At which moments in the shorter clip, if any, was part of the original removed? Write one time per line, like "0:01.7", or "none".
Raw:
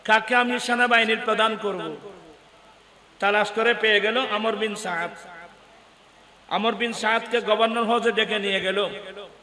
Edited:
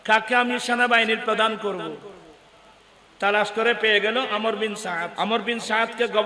0:05.1

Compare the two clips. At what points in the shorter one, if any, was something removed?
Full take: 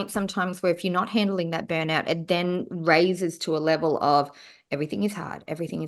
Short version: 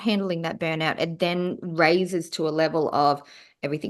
none

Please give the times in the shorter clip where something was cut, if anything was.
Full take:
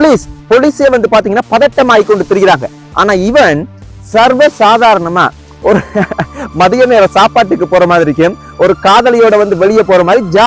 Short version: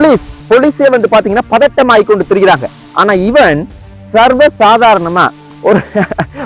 none

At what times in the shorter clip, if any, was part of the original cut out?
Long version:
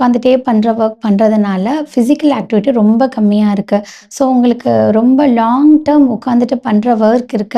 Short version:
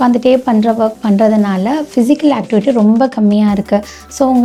none

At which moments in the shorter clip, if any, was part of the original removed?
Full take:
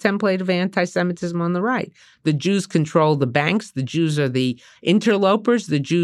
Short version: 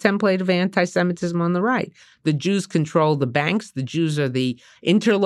none

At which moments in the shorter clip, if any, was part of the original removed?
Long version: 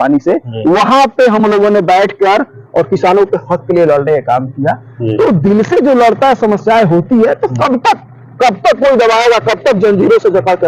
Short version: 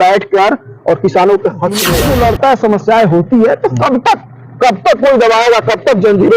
0:01.8

